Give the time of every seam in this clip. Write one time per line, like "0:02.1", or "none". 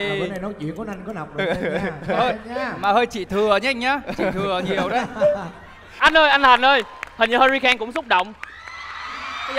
0:05.8